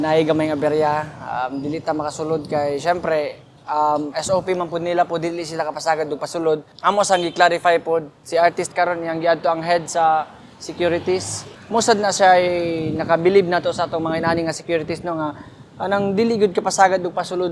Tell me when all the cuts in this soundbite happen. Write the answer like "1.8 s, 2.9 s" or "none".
none